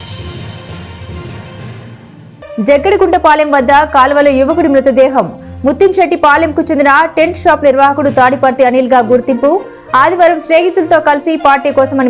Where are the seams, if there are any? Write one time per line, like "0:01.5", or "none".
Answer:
0:01.8